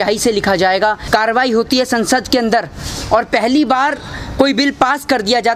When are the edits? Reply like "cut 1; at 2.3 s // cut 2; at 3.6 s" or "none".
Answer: cut 1; at 1.0 s